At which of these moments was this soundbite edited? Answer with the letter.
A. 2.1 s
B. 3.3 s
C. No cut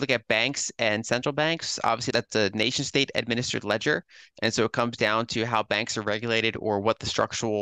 A